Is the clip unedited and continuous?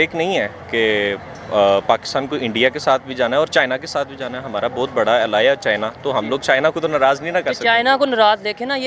yes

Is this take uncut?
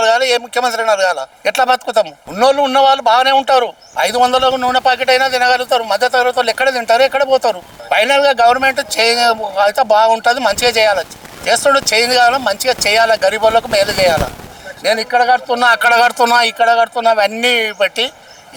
yes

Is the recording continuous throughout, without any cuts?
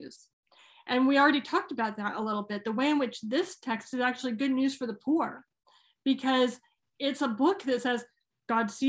yes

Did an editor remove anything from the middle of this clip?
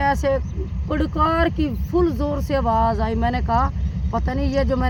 no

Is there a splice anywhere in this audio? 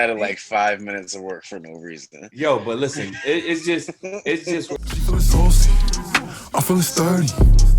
yes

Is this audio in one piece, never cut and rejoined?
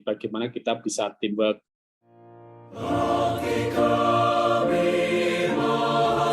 no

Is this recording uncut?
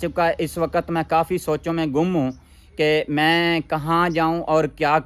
yes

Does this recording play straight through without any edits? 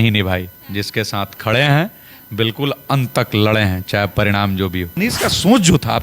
no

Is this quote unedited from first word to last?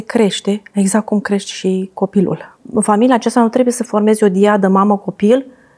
no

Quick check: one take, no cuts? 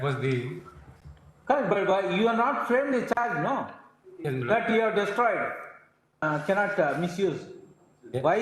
no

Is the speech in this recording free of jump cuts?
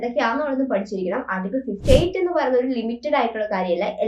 no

